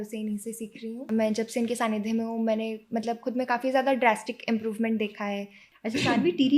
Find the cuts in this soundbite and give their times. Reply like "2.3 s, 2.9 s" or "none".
1.0 s, 5.6 s